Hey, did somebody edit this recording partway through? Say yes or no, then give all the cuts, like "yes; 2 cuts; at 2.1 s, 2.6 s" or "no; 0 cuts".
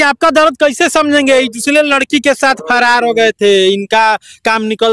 no; 0 cuts